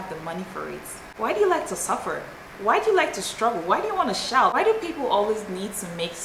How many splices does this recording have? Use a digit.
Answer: 2